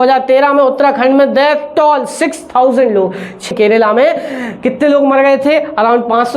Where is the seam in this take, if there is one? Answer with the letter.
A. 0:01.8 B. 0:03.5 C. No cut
B